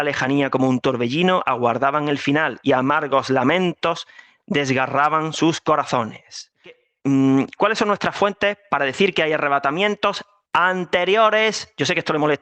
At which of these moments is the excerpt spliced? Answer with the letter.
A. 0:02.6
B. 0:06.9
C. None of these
B